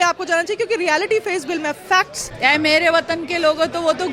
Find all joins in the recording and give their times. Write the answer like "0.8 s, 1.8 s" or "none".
2.2 s